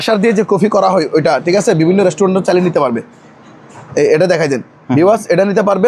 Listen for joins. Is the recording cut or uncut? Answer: uncut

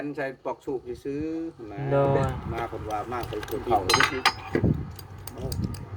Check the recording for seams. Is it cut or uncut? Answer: cut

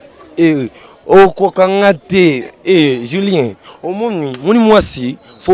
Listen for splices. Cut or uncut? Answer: uncut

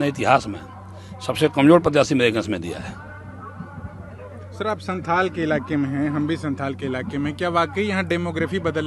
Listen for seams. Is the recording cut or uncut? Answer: uncut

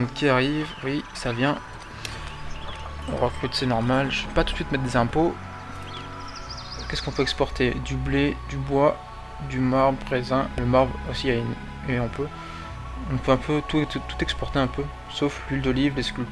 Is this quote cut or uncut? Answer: uncut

